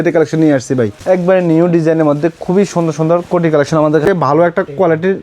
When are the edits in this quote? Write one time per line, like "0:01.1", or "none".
0:01.0
0:04.1